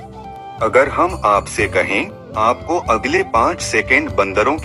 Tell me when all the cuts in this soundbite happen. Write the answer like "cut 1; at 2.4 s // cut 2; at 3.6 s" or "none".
none